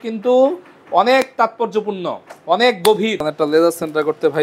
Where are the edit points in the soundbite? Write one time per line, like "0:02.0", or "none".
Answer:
0:03.2